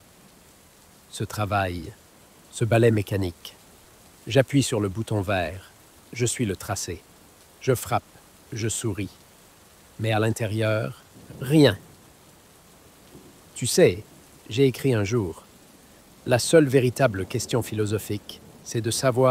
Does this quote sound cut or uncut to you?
uncut